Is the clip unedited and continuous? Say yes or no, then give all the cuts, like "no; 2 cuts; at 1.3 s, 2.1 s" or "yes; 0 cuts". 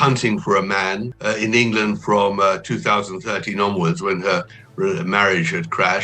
no; 2 cuts; at 1.1 s, 4.6 s